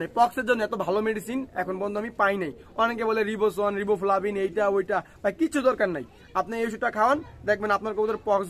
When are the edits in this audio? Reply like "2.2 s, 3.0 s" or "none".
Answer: none